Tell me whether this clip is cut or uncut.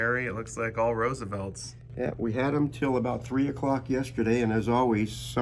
uncut